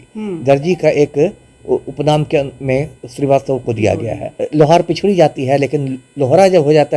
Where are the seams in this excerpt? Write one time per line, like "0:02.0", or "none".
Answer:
0:04.4